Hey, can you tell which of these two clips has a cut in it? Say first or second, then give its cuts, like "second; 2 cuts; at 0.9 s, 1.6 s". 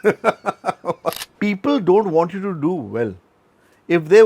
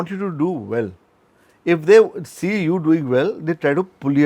first; 1 cut; at 1.2 s